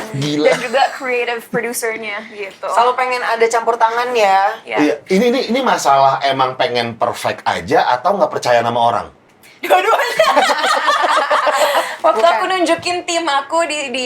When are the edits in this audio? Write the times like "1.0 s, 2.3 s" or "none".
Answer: 11.9 s